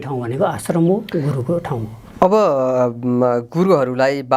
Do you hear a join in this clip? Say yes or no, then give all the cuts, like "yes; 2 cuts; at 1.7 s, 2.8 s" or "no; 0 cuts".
no; 0 cuts